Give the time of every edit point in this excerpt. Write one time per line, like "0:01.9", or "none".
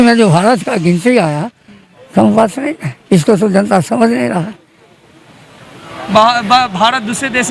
none